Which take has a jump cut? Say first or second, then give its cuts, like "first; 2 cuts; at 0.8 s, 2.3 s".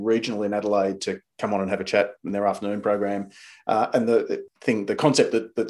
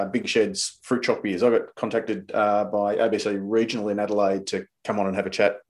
first; 1 cut; at 4.5 s